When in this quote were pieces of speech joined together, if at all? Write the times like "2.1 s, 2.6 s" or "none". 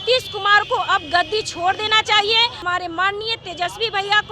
2.6 s